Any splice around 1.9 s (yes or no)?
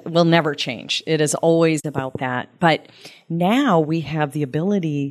yes